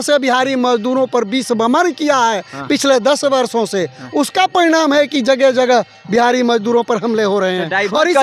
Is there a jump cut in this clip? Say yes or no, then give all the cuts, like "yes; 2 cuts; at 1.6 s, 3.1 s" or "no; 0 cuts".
no; 0 cuts